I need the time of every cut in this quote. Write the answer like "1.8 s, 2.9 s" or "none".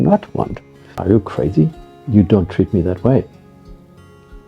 1.0 s